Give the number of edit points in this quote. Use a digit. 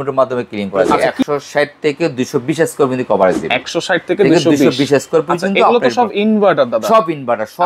1